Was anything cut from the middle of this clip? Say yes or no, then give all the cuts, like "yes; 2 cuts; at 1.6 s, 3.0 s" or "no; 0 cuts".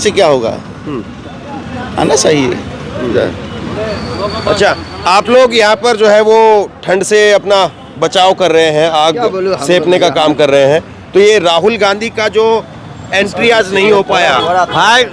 no; 0 cuts